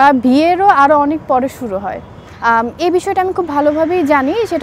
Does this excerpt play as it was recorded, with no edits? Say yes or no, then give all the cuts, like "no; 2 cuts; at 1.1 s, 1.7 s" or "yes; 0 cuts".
no; 1 cut; at 2.2 s